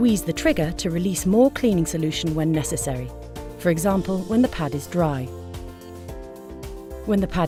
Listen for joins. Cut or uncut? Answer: uncut